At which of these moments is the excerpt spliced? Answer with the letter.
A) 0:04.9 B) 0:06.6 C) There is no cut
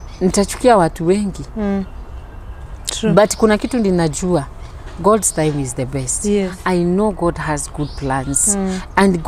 B